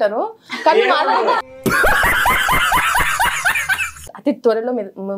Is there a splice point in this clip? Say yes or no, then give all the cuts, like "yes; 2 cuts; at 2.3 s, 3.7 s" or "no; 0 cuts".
yes; 1 cut; at 4.1 s